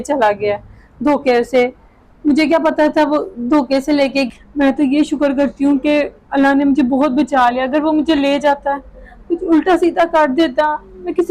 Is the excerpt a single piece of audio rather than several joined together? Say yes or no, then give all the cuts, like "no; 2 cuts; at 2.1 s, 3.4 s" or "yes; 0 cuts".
no; 1 cut; at 4.3 s